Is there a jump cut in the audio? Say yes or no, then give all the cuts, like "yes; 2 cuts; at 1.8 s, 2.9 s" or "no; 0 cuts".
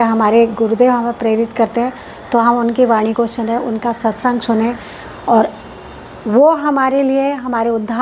no; 0 cuts